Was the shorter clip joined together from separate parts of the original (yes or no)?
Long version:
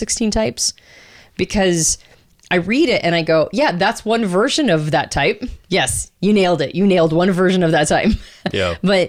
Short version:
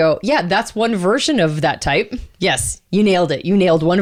no